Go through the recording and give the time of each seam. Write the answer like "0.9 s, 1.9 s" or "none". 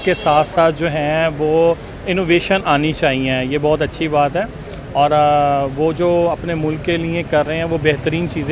none